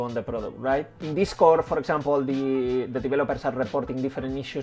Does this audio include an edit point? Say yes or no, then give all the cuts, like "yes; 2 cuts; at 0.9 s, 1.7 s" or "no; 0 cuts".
no; 0 cuts